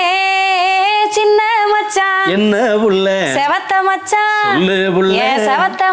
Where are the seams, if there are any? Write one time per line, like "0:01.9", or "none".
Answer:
none